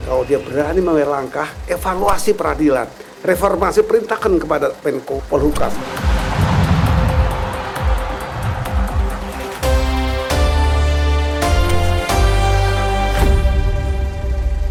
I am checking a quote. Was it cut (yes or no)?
no